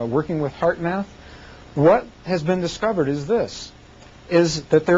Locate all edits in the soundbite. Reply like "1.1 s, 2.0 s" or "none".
none